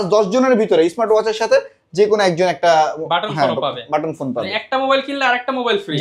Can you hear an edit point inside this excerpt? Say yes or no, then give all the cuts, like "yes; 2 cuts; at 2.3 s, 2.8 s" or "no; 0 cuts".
no; 0 cuts